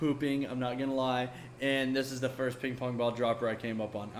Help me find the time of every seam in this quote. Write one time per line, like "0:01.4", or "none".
none